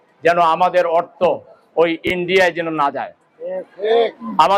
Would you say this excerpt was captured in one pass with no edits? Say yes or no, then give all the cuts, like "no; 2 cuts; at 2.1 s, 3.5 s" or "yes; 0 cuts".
yes; 0 cuts